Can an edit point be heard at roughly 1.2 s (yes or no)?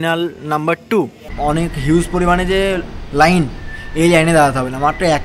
yes